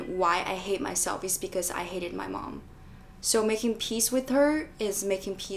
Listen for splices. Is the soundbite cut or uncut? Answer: uncut